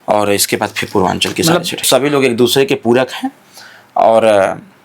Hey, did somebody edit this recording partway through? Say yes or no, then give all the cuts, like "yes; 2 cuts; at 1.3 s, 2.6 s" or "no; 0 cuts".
yes; 1 cut; at 1.8 s